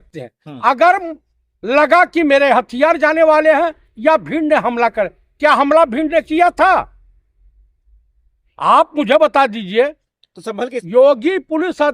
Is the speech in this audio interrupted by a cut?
yes; 1 cut; at 10.8 s

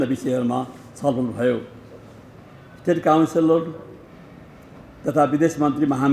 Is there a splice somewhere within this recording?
no; 0 cuts

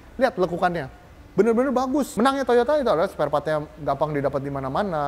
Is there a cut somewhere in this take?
yes; 1 cut; at 2.1 s

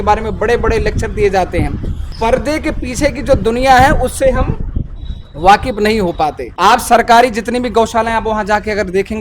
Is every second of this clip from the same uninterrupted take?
no; 2 cuts; at 2.0 s, 6.4 s

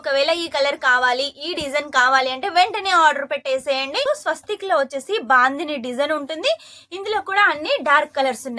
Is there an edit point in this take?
yes; 1 cut; at 4.0 s

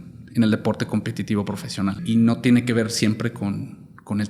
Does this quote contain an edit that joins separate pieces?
yes; 1 cut; at 2.0 s

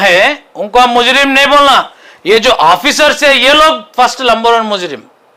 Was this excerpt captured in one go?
yes; 0 cuts

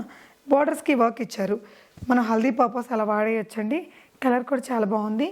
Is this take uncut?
yes; 0 cuts

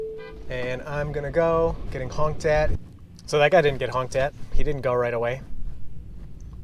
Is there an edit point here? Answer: yes; 1 cut; at 2.8 s

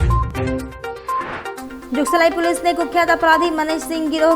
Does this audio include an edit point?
yes; 1 cut; at 1.0 s

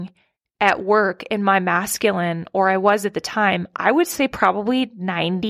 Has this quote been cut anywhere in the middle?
no; 0 cuts

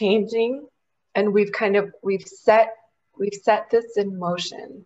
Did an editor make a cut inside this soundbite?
no; 0 cuts

